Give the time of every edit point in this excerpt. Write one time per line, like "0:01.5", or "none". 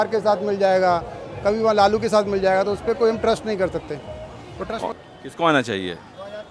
0:05.0